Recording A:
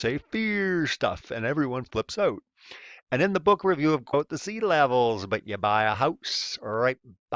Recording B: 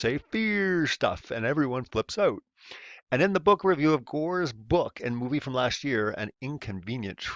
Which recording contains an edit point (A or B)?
B